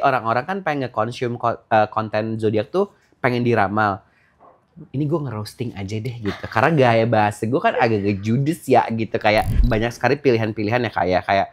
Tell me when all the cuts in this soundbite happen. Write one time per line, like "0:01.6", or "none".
0:09.6